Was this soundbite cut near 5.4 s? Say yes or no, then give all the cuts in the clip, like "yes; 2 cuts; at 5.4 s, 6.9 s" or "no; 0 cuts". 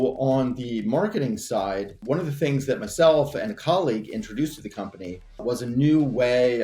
yes; 2 cuts; at 2.0 s, 5.4 s